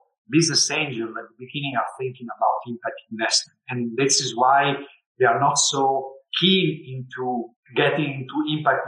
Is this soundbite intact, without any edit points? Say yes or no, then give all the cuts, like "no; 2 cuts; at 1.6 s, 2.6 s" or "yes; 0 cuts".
yes; 0 cuts